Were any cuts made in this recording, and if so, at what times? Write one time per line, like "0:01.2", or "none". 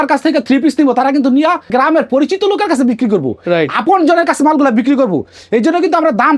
0:01.7